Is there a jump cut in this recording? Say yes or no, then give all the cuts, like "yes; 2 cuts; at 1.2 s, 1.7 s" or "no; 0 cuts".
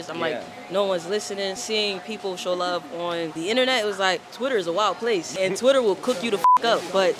yes; 4 cuts; at 1.6 s, 3.3 s, 4.3 s, 5.3 s